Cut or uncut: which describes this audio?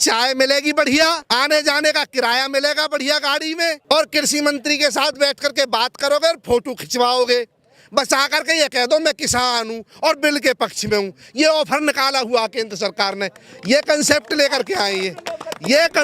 cut